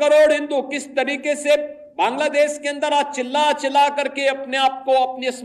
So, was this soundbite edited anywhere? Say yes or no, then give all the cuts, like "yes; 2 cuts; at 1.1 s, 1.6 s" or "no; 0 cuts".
no; 0 cuts